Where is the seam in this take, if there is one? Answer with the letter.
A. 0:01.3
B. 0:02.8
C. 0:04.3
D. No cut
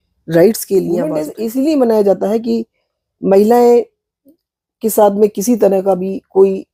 A